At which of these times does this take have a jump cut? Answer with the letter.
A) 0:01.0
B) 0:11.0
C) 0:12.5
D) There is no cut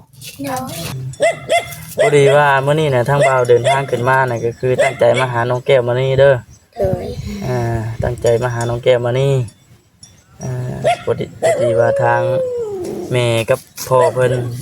A